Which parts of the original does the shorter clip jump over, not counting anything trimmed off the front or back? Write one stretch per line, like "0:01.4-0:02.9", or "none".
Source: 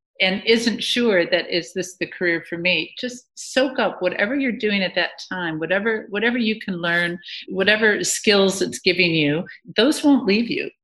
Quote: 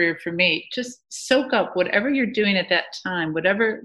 none

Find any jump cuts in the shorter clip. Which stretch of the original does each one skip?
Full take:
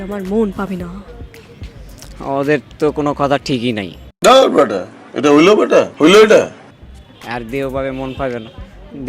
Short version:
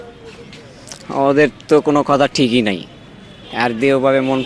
0:04.0-0:06.6

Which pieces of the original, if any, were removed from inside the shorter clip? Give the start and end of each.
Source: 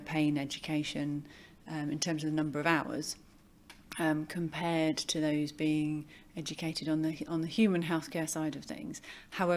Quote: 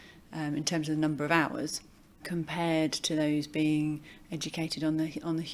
0:03.6-0:04.3

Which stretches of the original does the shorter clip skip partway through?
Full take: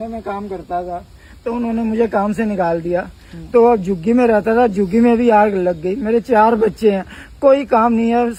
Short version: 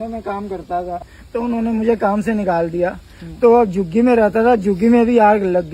0:01.1-0:01.3

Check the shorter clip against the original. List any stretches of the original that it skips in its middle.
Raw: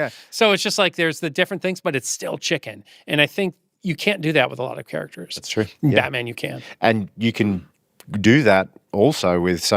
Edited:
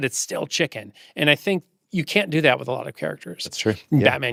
none

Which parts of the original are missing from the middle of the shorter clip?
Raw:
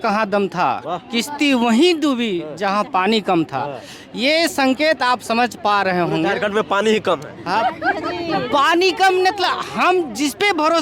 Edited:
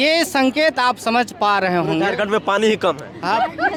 none

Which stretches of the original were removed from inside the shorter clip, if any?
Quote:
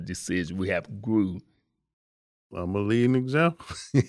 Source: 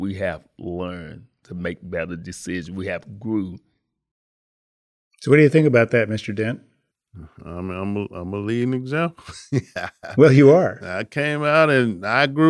0:04.7-0:08.1

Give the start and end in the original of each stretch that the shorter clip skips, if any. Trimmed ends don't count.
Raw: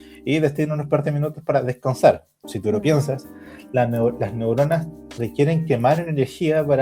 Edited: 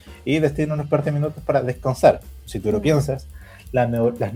none

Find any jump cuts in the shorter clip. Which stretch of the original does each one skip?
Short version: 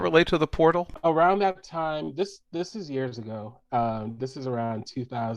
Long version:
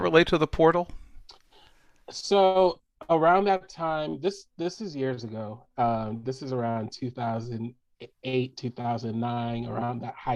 0:00.9-0:03.0

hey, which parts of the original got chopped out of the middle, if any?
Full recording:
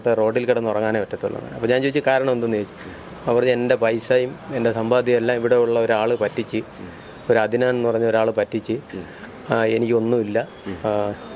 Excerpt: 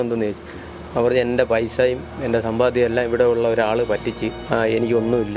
0:06.6-0:09.3

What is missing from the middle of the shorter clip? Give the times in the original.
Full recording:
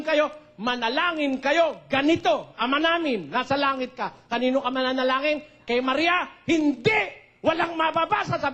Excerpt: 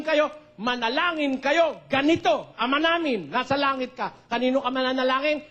none

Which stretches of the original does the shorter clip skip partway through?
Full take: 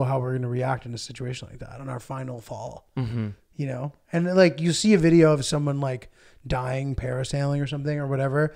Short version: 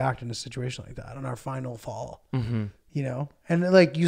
none

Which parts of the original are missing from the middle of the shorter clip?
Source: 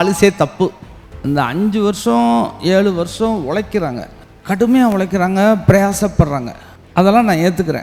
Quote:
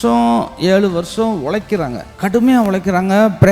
0:04.1-0:04.3

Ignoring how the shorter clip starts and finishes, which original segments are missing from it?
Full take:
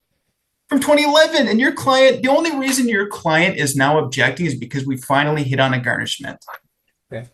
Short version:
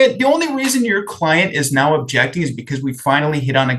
none

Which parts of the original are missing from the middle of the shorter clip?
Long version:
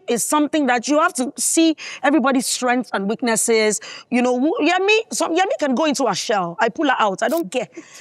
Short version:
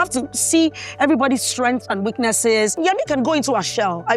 0:03.8-0:05.3

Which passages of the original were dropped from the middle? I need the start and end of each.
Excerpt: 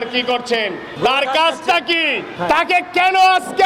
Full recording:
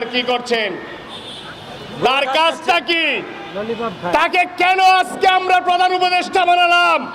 0:00.9-0:01.9
0:03.3-0:04.0

